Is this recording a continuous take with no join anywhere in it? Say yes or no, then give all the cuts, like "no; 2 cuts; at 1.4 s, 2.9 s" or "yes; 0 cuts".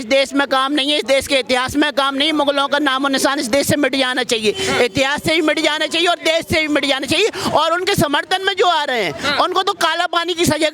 yes; 0 cuts